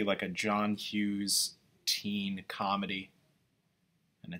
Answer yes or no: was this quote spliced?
yes